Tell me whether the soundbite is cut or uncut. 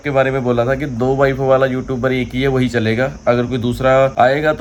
uncut